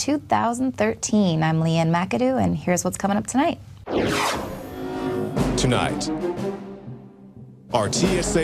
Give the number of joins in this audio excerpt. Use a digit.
1